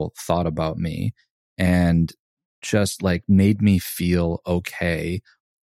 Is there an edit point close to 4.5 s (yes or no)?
no